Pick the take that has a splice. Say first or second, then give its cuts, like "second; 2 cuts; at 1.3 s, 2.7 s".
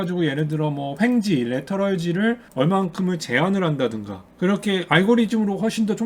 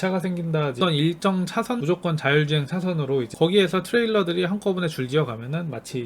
second; 3 cuts; at 0.8 s, 1.8 s, 3.3 s